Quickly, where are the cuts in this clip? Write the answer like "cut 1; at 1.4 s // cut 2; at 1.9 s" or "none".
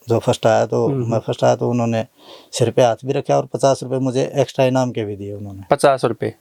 none